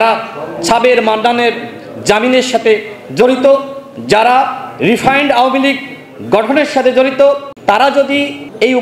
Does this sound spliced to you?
yes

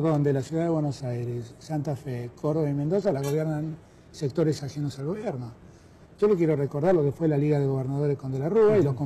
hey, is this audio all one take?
yes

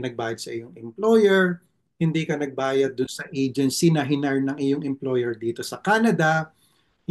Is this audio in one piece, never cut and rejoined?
yes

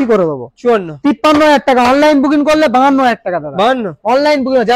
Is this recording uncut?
yes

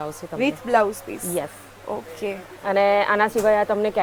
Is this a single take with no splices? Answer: yes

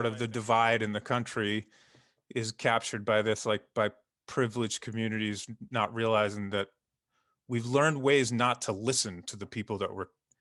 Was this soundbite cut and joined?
no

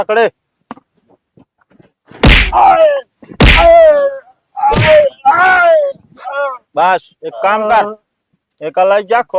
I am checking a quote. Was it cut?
no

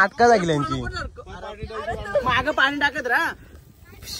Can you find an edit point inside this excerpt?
no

